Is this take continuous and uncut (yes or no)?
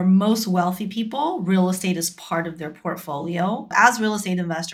no